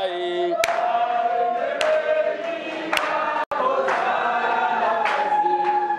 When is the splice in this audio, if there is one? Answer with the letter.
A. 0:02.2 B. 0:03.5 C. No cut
C